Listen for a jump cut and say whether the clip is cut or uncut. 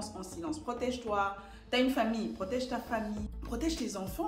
cut